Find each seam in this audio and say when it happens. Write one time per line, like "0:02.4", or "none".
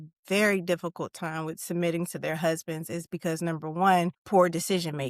0:04.2